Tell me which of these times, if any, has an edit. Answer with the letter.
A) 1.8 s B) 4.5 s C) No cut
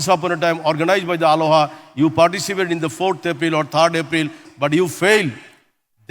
B